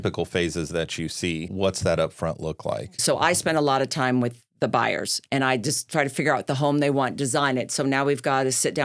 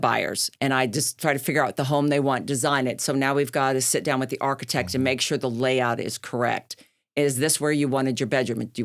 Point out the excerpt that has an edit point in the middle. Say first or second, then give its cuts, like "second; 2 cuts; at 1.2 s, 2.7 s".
first; 2 cuts; at 1.5 s, 3.0 s